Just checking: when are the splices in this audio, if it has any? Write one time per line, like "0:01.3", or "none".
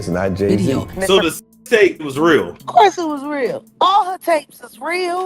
0:00.9